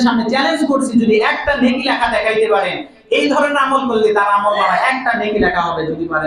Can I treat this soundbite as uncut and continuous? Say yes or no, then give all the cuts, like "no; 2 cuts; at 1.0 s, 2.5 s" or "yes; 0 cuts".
yes; 0 cuts